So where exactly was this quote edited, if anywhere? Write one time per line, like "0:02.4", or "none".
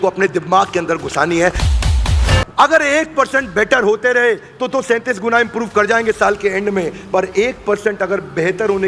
0:01.9